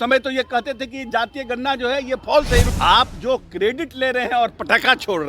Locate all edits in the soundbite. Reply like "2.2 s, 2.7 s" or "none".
2.7 s

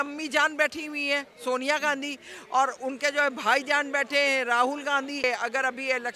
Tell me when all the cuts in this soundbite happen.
5.2 s

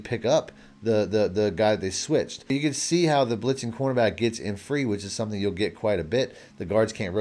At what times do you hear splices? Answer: 2.5 s

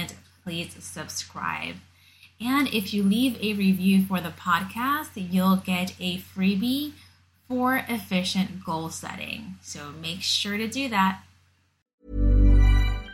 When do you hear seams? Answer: 11.8 s

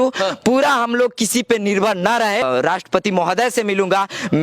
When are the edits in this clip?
2.4 s

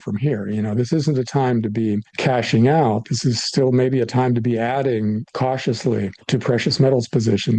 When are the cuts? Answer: 2.1 s, 5.3 s, 6.2 s

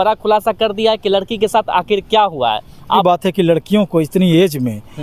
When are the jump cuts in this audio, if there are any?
3.0 s

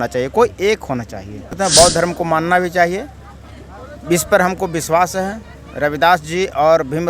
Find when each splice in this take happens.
1.5 s

